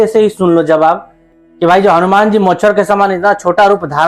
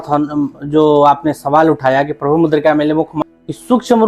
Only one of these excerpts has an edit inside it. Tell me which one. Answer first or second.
second